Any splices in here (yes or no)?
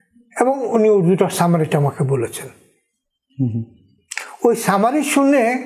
no